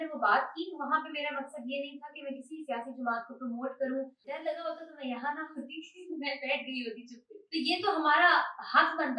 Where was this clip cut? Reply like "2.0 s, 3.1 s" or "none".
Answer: 4.2 s, 7.3 s